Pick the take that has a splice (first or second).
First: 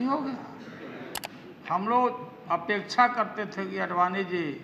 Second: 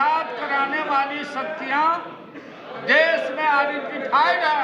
first